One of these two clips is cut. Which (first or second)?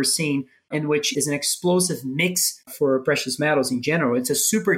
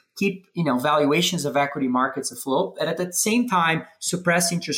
first